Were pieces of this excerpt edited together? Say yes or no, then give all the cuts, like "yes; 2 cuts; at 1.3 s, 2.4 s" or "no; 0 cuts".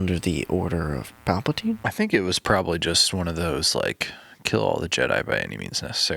yes; 1 cut; at 1.8 s